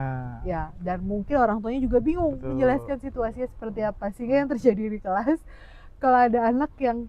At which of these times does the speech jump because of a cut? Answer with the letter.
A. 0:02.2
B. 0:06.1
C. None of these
C